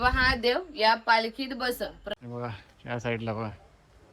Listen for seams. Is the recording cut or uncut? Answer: cut